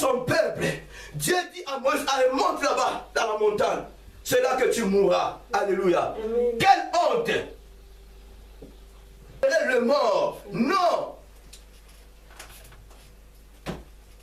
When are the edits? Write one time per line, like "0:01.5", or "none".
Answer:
0:09.4